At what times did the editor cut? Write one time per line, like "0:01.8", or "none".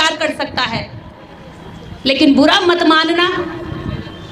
none